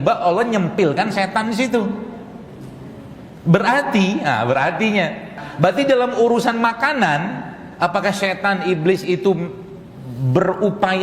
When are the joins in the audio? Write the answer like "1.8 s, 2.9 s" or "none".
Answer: 5.4 s